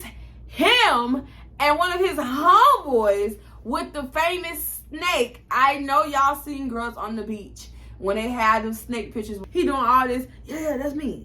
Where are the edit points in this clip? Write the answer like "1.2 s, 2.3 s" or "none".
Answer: 9.4 s